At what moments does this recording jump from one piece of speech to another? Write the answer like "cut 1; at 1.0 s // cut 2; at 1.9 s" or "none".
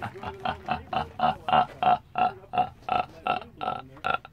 none